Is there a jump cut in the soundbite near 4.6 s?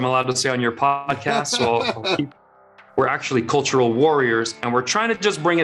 no; 1 cut; at 2.8 s

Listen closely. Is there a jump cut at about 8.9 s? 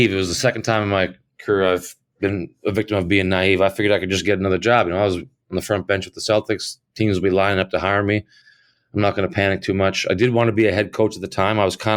no; 0 cuts

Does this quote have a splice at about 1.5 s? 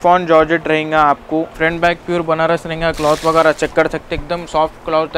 yes; 1 cut; at 1.5 s

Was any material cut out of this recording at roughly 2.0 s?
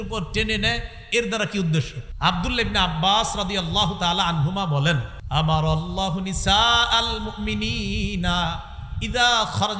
yes; 2 cuts; at 2.0 s, 5.1 s

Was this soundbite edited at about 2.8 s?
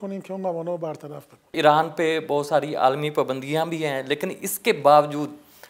no; 1 cut; at 1.5 s

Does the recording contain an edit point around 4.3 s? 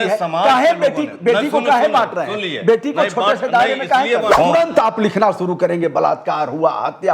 yes; 1 cut; at 4.3 s

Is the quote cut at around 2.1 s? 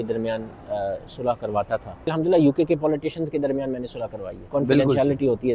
yes; 2 cuts; at 2.1 s, 4.4 s

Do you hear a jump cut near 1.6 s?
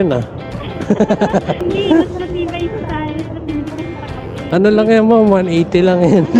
yes; 2 cuts; at 1.6 s, 4.3 s

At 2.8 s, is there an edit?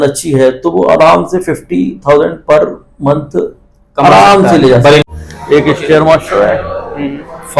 no; 1 cut; at 5.1 s

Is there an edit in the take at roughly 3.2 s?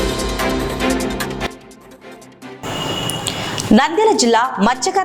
no; 1 cut; at 1.4 s

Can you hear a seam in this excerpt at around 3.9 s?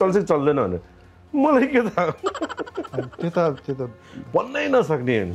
no; 0 cuts

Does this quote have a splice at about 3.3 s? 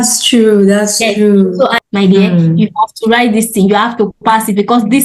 no; 1 cut; at 1.7 s

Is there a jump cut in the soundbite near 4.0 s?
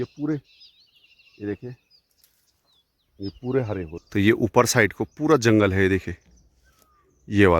yes; 1 cut; at 4.0 s

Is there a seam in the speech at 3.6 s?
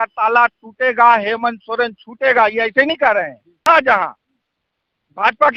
yes; 1 cut; at 3.6 s

